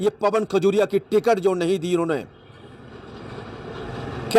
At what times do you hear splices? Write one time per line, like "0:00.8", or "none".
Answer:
none